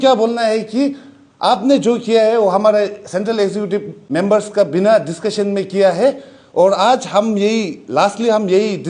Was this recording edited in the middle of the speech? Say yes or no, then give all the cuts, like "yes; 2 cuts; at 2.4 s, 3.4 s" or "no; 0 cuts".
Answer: yes; 1 cut; at 4.0 s